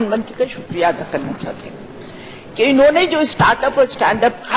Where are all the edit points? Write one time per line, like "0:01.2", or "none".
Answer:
none